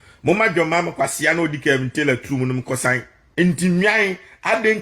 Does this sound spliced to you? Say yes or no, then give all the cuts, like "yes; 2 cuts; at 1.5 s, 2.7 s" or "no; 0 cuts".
yes; 1 cut; at 3.2 s